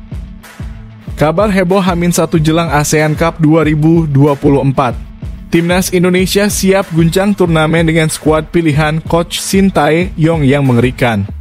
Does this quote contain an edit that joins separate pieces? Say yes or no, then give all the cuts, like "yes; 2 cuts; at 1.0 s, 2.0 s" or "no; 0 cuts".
yes; 1 cut; at 1.0 s